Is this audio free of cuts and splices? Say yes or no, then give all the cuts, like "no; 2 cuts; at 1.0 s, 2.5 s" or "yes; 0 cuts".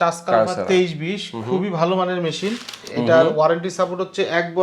no; 1 cut; at 2.9 s